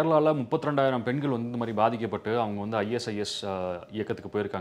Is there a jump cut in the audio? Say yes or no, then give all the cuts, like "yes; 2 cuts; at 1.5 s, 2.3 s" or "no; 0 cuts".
no; 0 cuts